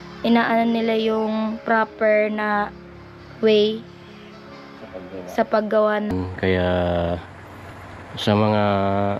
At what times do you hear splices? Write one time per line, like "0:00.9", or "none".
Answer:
0:06.1